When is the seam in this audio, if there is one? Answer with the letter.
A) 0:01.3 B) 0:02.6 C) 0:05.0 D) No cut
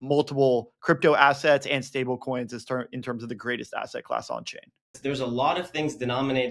C